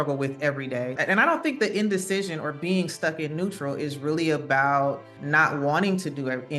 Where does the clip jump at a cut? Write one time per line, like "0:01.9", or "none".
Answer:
0:01.0
0:05.1

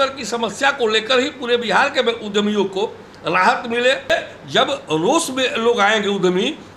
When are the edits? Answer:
0:04.1

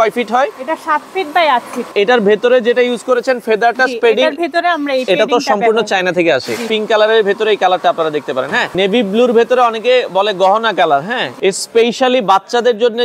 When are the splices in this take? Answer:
0:01.9
0:06.7
0:08.7
0:11.2

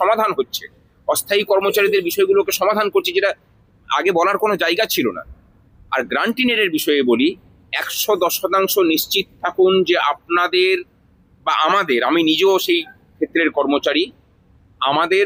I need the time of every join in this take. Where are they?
none

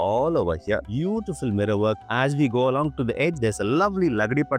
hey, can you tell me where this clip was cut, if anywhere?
0:02.0

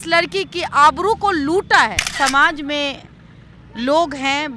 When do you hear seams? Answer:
0:02.1

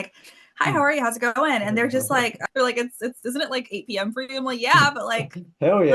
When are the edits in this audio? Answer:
0:02.4

